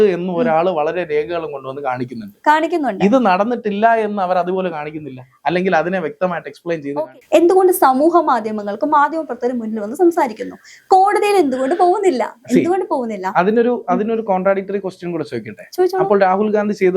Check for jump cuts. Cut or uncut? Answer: cut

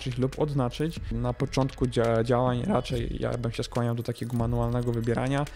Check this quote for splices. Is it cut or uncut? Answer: cut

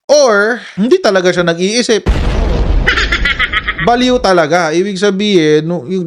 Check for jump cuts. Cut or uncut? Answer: uncut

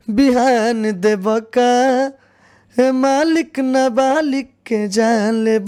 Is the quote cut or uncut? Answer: uncut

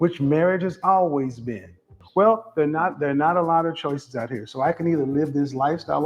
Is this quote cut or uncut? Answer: cut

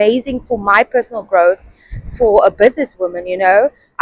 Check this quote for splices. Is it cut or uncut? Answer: uncut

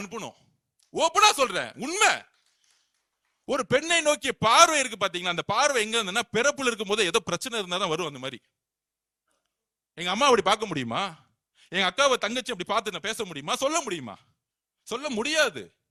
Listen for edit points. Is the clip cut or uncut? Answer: uncut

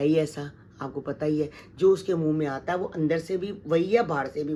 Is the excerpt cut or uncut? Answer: uncut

